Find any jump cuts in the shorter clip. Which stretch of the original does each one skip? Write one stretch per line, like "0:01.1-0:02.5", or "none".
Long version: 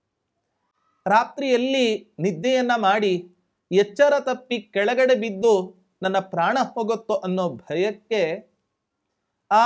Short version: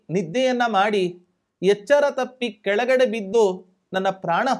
none